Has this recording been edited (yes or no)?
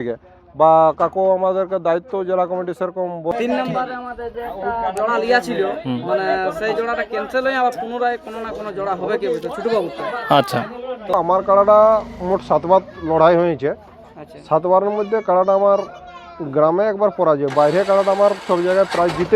yes